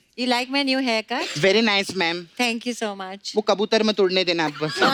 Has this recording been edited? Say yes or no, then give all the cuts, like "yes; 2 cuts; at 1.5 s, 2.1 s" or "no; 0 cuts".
no; 0 cuts